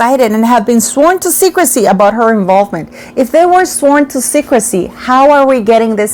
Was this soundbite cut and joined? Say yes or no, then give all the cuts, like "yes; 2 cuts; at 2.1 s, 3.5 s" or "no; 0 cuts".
no; 0 cuts